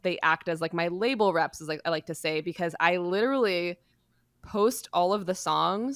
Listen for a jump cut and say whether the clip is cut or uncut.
uncut